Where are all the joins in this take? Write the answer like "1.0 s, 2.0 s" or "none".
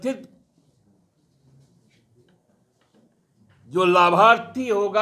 none